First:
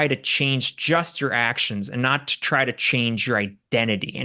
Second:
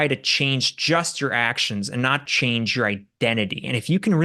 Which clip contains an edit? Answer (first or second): second